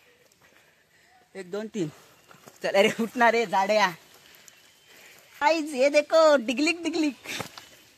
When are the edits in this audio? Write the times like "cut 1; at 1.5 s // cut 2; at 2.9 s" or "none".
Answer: cut 1; at 5.4 s